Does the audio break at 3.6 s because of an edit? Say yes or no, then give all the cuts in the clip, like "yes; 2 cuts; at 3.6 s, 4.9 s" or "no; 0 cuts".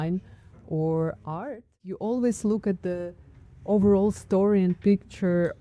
no; 1 cut; at 2.0 s